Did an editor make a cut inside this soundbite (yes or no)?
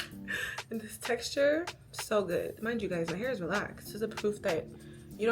yes